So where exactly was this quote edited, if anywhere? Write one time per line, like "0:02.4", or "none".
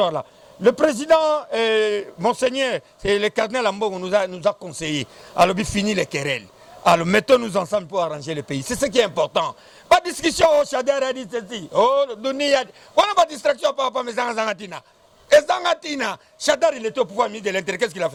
none